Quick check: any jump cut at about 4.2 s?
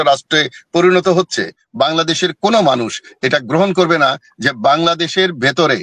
no; 1 cut; at 1.6 s

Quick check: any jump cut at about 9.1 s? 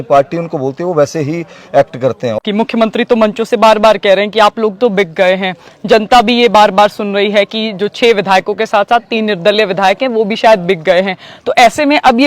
no; 1 cut; at 2.4 s

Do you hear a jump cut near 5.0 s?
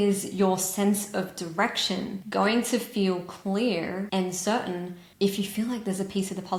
no; 0 cuts

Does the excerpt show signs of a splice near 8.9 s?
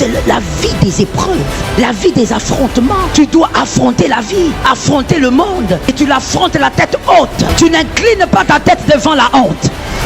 no; 5 cuts; at 1.7 s, 3.1 s, 4.6 s, 5.9 s, 7.5 s

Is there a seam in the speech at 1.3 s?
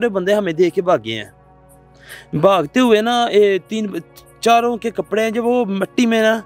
no; 0 cuts

